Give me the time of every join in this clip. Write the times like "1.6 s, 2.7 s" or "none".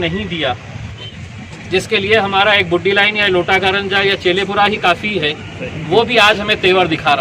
1.1 s